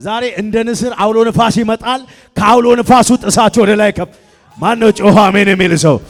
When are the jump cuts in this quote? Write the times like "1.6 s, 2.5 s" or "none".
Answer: none